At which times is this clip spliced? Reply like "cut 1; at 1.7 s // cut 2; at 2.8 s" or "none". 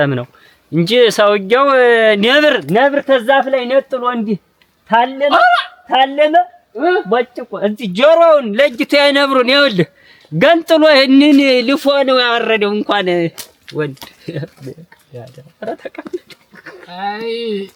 none